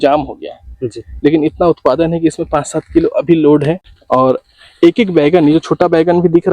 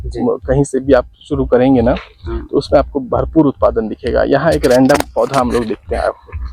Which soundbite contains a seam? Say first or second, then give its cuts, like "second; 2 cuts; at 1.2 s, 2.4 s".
first; 1 cut; at 3.9 s